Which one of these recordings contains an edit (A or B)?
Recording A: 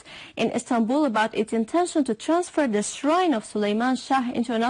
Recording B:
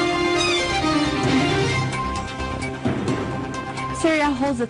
A